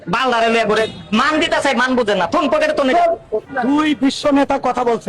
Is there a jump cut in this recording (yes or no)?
yes